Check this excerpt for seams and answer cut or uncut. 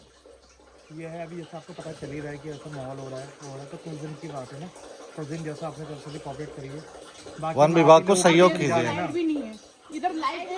uncut